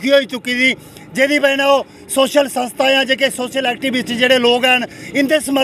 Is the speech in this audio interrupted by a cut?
no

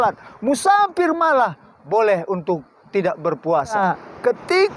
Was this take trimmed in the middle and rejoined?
yes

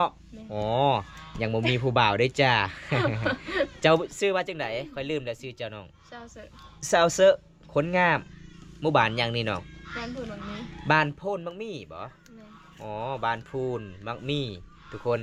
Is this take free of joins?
yes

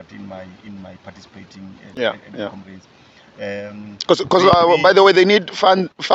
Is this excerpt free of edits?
yes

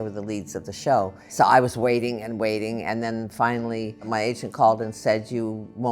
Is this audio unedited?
no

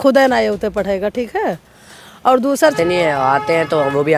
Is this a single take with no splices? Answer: no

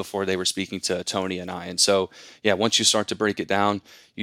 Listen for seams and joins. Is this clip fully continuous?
yes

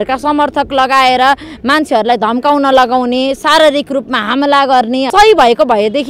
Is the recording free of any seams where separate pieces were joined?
no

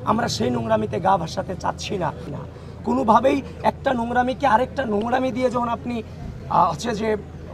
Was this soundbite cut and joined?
yes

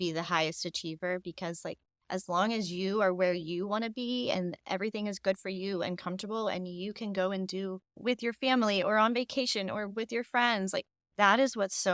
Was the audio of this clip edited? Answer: yes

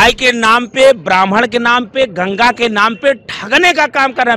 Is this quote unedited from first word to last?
yes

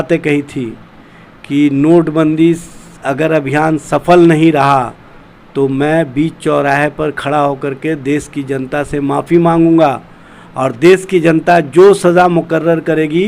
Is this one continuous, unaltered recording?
yes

